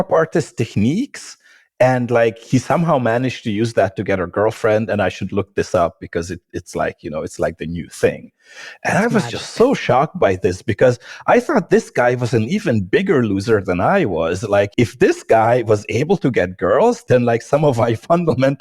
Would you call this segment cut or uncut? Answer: cut